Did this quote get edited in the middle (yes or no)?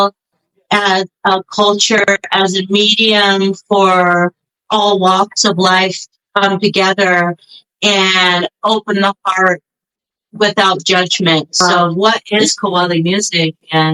no